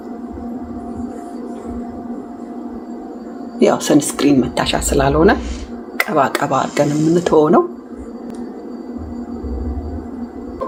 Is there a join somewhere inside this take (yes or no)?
no